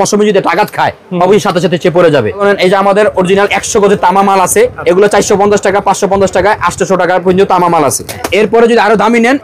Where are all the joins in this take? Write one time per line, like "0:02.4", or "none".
0:02.4
0:04.8
0:08.2

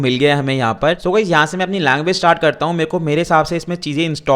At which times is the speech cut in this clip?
0:01.0

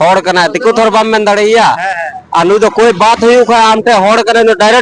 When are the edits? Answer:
none

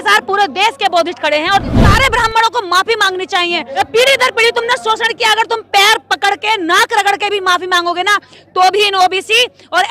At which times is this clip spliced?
0:01.8
0:03.7

